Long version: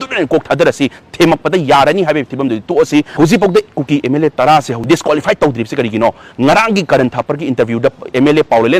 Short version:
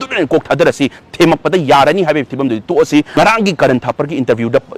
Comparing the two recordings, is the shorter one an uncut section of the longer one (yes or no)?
no